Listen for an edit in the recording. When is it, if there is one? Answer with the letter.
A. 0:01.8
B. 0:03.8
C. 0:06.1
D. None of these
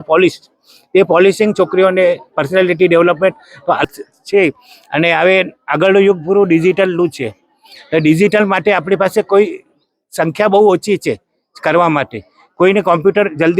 B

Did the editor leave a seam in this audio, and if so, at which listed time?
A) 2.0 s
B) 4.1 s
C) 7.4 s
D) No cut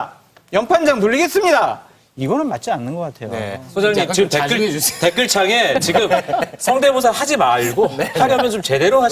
D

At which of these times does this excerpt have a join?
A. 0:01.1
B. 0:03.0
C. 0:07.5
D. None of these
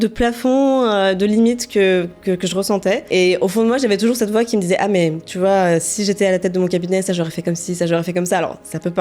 B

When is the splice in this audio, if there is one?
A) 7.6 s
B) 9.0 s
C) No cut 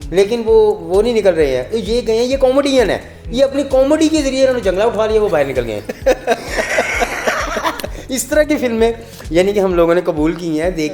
C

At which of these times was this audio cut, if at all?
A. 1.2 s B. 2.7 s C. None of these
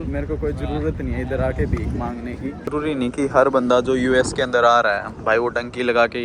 B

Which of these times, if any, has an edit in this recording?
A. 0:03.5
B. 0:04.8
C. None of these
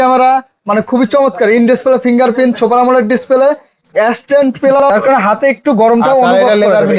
B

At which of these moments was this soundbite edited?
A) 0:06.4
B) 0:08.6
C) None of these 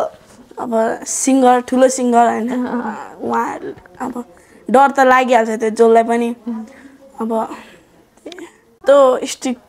B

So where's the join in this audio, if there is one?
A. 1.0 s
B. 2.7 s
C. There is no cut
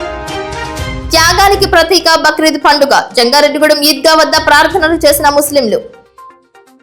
A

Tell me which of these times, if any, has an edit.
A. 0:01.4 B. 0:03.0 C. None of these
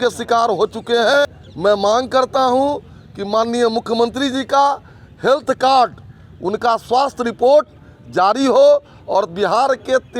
A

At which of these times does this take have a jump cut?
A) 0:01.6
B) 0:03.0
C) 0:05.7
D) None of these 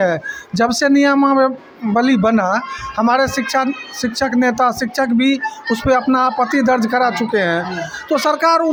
D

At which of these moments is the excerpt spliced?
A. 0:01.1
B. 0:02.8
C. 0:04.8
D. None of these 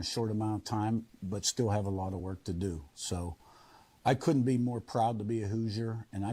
A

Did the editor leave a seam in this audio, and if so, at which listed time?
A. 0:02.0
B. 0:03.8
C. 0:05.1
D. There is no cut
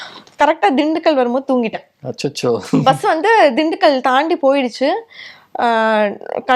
D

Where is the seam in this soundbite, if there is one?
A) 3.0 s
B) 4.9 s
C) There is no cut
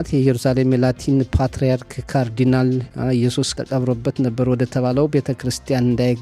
A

